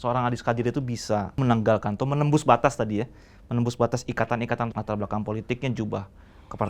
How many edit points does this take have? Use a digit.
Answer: 2